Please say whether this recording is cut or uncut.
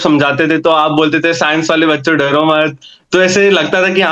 uncut